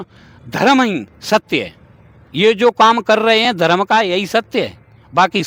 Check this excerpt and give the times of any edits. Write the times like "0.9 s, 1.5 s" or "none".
none